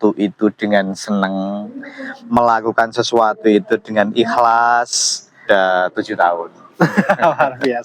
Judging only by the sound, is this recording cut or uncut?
cut